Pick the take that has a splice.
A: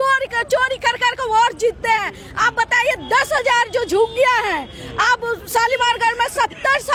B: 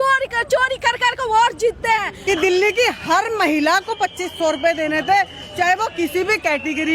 B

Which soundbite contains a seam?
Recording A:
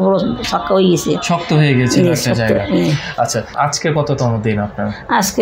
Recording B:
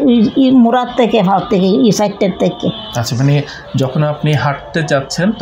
A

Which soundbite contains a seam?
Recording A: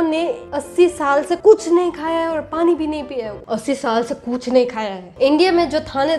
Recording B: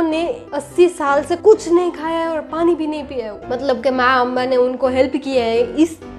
A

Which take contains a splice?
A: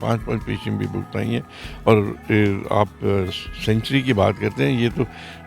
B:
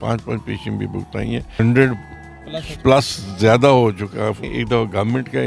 B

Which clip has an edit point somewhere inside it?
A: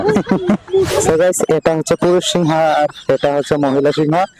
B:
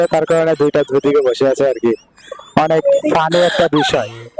A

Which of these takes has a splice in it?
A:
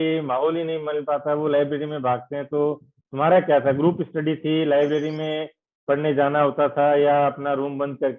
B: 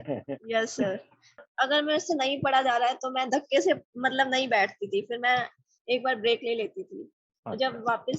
B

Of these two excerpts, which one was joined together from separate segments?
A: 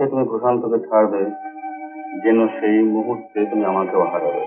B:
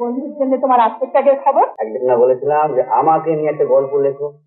B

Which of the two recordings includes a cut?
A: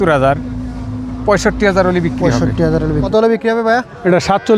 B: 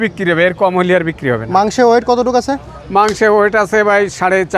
A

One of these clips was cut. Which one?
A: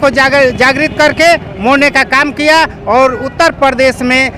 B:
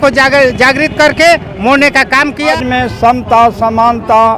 B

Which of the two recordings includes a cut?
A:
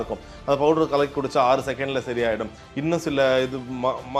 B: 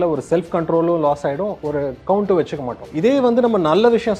B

